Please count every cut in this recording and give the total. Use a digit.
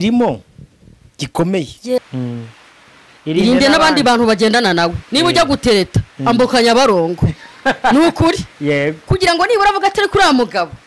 1